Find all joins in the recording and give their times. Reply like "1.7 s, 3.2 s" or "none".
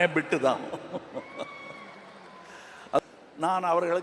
3.0 s